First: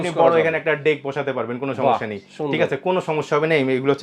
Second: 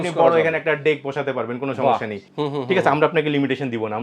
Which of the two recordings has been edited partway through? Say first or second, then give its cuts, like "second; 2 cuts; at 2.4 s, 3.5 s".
second; 1 cut; at 2.2 s